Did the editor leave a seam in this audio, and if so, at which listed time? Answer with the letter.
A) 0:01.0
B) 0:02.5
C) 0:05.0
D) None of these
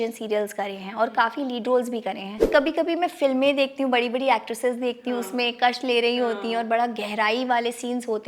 B